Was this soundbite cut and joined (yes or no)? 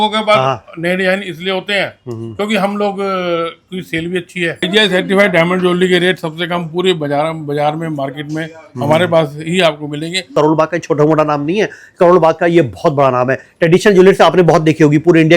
yes